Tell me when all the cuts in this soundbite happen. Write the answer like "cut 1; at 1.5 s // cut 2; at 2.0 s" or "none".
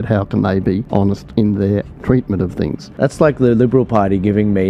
cut 1; at 1.2 s // cut 2; at 2.9 s